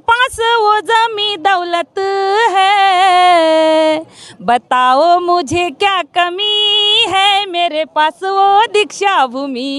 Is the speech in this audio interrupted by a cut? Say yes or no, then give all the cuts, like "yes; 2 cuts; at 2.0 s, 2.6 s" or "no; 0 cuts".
no; 0 cuts